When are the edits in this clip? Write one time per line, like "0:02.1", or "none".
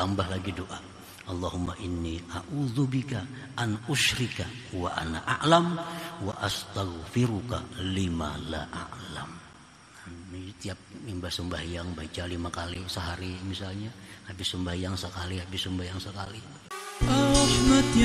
0:16.5